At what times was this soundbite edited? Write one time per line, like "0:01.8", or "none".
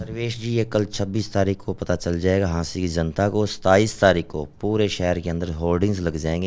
none